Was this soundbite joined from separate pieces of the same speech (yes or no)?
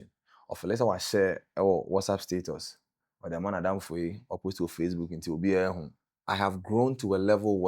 yes